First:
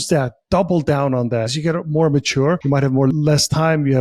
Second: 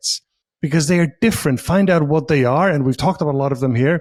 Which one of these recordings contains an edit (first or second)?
first